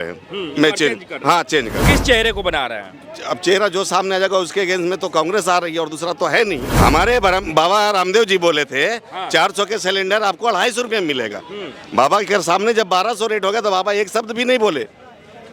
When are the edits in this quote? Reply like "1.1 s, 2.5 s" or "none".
1.8 s, 6.7 s